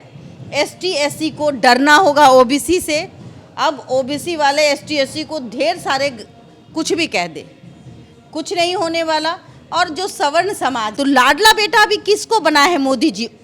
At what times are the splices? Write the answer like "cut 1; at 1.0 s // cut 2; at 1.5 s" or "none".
cut 1; at 10.9 s